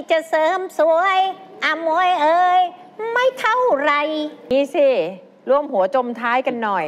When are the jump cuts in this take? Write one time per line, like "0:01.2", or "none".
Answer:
0:04.5